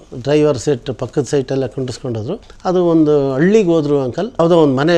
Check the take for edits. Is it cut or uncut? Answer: cut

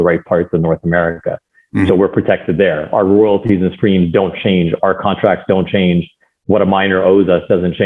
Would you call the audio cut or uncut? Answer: uncut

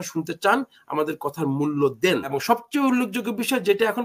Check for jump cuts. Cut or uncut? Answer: cut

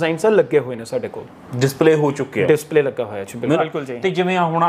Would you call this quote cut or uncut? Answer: cut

